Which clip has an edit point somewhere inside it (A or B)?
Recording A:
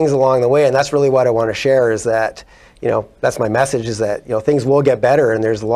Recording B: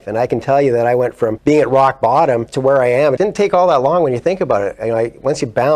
B